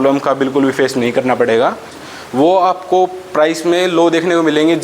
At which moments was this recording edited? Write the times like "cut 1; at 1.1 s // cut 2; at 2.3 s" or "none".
cut 1; at 2.0 s